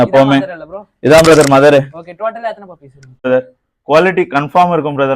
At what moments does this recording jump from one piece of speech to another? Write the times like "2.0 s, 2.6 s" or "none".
3.3 s